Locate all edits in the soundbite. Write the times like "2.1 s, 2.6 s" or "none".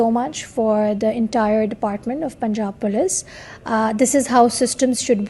none